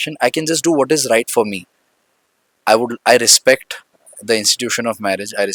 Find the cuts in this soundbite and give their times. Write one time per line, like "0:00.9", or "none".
none